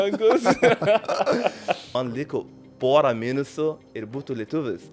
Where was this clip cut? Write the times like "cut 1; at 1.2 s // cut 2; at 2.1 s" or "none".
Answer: cut 1; at 1.9 s